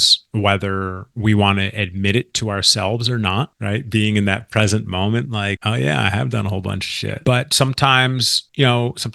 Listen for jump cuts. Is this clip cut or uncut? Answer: cut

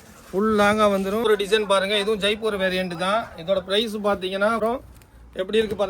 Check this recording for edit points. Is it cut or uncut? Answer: cut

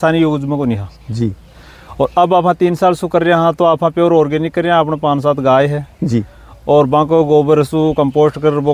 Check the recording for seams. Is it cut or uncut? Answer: uncut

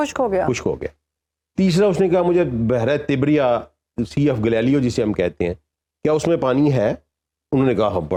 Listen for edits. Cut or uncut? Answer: uncut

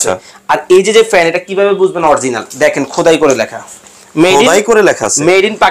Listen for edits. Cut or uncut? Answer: uncut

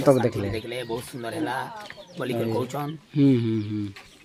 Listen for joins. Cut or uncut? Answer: uncut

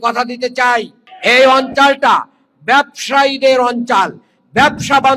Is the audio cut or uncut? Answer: cut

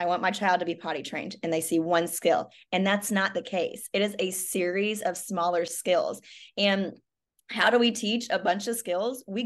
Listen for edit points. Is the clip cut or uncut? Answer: uncut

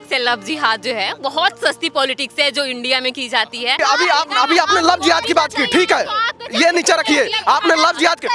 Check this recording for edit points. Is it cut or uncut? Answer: cut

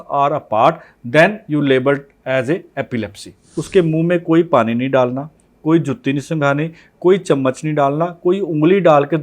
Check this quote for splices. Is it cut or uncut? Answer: cut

